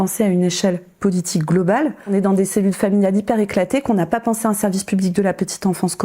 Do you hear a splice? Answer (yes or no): yes